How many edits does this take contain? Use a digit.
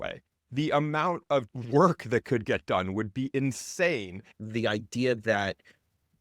1